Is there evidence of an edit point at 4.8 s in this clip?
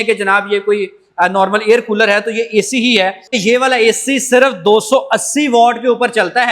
no; 1 cut; at 3.3 s

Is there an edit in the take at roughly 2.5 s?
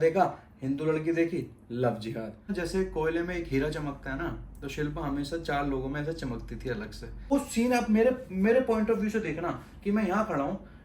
yes; 2 cuts; at 2.5 s, 7.3 s

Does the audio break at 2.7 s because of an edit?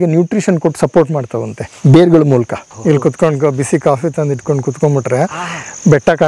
yes; 1 cut; at 2.7 s

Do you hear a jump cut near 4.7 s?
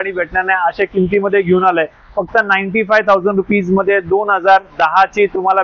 no; 0 cuts

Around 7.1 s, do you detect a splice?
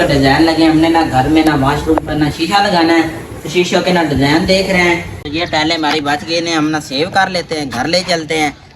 no; 1 cut; at 5.1 s

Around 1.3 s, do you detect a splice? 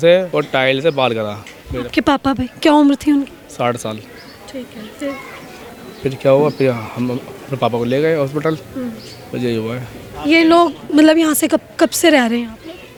no; 0 cuts

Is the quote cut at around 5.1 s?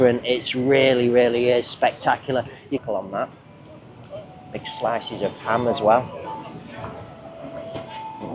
no; 1 cut; at 2.8 s

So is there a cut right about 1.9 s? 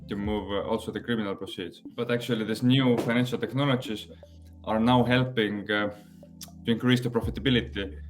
yes; 1 cut; at 1.9 s

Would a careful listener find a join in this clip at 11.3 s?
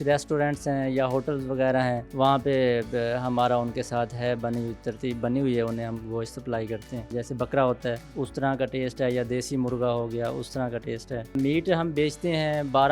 yes; 4 cuts; at 2.1 s, 7.1 s, 8.1 s, 11.3 s

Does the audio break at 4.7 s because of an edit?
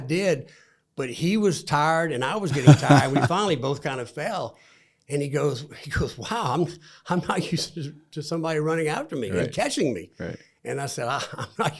no; 0 cuts

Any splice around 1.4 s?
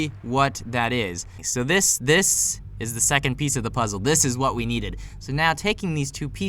yes; 1 cut; at 1.4 s

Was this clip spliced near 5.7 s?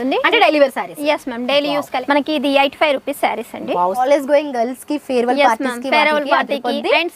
no; 2 cuts; at 2.0 s, 4.0 s

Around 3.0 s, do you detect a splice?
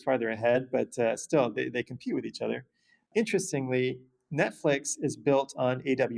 yes; 1 cut; at 3.0 s

